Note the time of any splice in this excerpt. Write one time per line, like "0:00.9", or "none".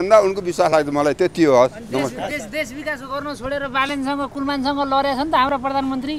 none